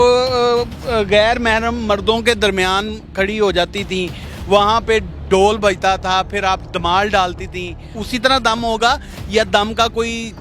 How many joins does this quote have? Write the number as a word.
one